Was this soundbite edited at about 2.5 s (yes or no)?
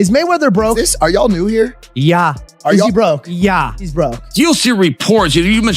no